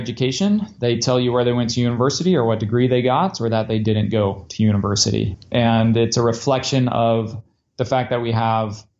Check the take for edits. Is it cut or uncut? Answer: cut